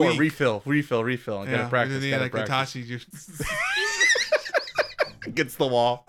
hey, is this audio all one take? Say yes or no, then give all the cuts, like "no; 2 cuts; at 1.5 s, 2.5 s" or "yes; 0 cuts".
no; 1 cut; at 3.1 s